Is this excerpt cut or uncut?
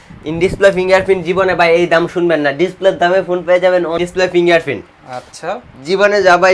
cut